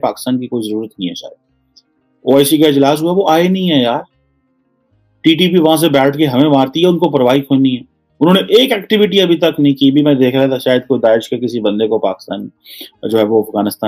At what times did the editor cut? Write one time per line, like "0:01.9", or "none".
none